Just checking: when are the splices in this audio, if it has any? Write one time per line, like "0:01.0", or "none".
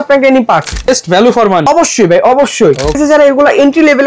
0:00.9
0:01.6
0:03.0